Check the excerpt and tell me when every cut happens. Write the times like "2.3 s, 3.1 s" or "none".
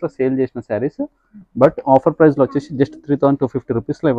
none